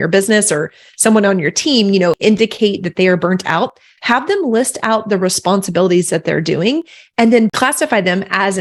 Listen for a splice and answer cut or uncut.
uncut